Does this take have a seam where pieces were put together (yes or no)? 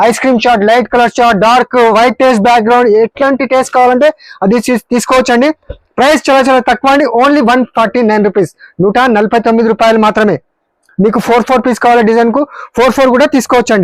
no